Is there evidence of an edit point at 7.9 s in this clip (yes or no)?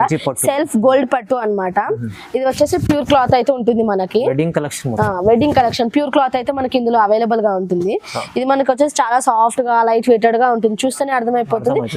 no